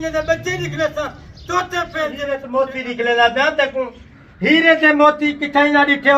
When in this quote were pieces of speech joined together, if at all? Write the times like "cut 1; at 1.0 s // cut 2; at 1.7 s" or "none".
cut 1; at 2.4 s